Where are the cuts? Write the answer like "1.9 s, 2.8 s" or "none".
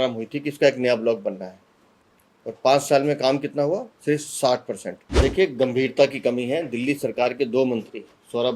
5.0 s